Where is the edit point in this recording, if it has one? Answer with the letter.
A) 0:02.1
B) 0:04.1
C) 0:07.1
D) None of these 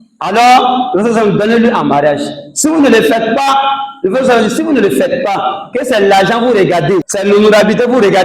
C